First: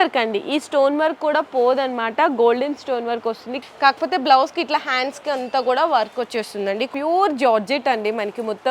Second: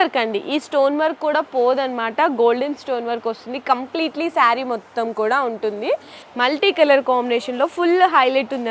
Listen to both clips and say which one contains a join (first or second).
first